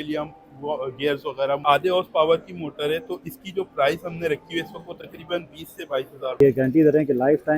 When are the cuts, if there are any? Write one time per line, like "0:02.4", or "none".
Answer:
0:01.6
0:06.4